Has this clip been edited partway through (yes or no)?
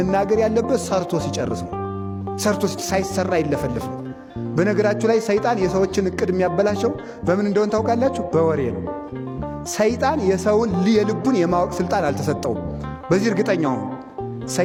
no